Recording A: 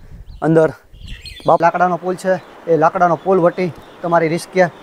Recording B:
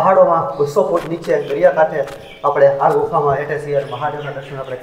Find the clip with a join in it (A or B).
A